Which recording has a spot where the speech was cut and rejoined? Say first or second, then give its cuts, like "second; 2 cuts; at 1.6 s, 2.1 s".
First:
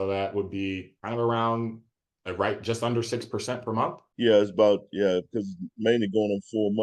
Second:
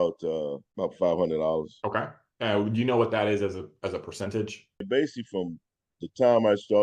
second; 1 cut; at 4.8 s